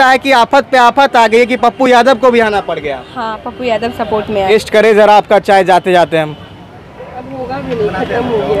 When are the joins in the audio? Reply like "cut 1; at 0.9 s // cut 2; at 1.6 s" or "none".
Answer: cut 1; at 4.5 s

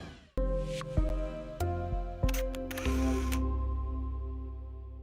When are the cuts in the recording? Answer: cut 1; at 1.1 s

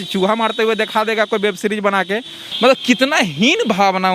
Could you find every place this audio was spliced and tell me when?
cut 1; at 2.4 s

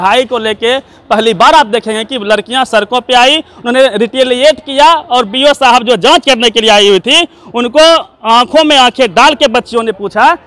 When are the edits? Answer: none

